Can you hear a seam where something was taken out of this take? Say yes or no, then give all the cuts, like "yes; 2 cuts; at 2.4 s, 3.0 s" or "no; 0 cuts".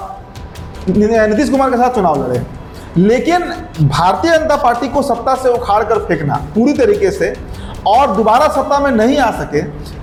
no; 0 cuts